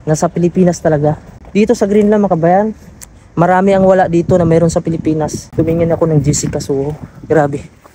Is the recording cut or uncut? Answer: cut